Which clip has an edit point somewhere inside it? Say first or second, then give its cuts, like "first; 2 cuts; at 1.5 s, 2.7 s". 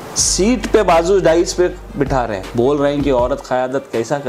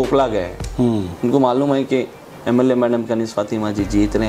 first; 1 cut; at 2.5 s